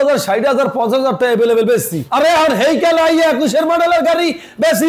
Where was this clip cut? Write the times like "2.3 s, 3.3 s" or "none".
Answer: none